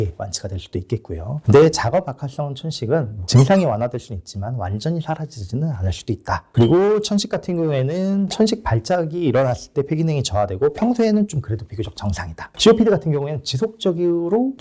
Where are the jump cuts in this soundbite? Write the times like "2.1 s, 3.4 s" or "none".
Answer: 3.2 s, 6.5 s